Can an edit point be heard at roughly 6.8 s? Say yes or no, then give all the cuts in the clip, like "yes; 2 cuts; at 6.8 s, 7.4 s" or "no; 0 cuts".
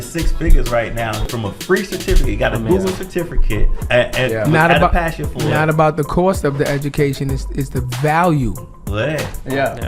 no; 2 cuts; at 1.3 s, 3.7 s